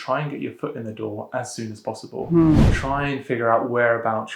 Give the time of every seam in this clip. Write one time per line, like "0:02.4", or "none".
0:02.8